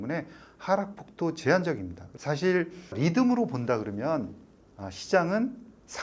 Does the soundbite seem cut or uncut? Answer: cut